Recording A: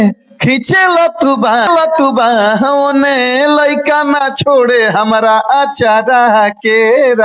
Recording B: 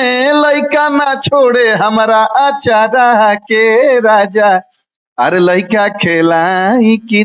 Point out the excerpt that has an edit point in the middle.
A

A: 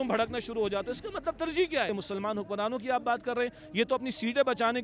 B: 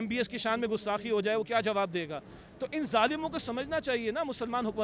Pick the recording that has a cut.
A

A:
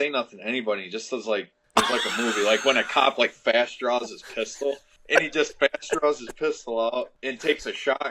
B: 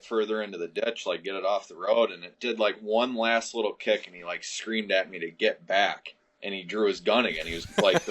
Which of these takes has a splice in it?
A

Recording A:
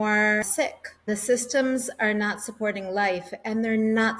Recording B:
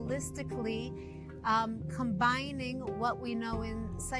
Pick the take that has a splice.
A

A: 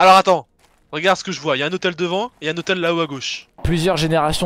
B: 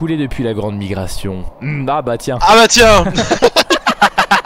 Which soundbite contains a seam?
A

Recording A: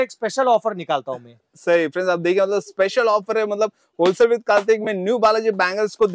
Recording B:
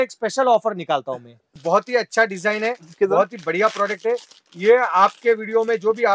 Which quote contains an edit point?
B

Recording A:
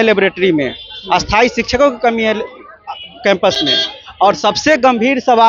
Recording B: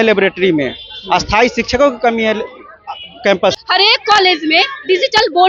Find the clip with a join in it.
B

